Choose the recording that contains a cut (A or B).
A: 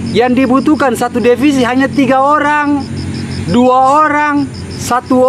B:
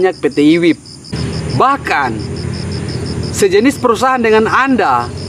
B